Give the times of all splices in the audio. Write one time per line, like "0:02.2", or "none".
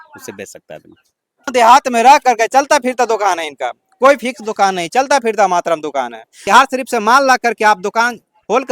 0:01.5
0:06.5